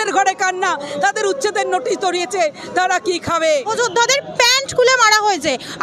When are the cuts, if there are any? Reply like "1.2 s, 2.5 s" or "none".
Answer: 3.7 s